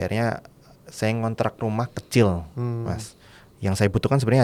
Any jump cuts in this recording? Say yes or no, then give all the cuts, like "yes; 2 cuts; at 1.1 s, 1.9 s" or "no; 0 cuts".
no; 0 cuts